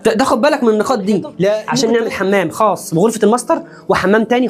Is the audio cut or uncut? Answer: cut